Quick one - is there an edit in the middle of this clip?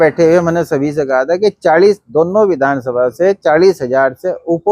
no; 0 cuts

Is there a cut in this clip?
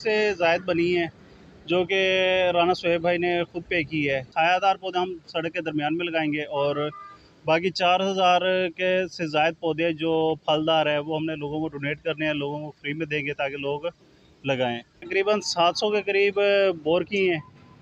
yes; 2 cuts; at 4.3 s, 15.1 s

